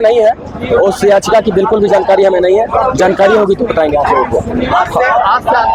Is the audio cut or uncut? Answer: uncut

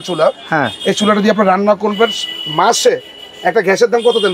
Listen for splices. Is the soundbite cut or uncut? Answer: uncut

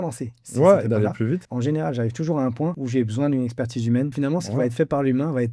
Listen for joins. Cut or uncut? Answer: cut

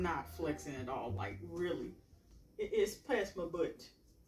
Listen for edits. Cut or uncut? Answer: uncut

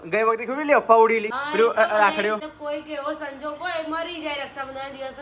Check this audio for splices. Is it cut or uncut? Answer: cut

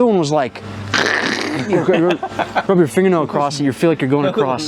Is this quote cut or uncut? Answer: uncut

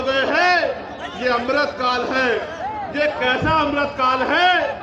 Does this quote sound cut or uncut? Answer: uncut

